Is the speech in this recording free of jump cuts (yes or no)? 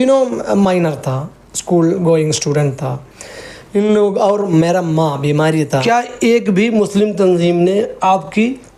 no